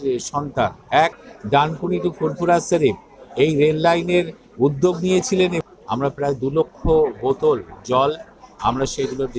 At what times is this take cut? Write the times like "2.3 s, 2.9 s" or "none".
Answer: 1.3 s, 5.7 s